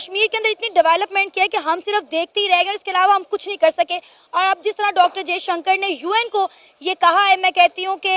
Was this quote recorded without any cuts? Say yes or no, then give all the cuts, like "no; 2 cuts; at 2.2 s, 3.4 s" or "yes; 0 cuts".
yes; 0 cuts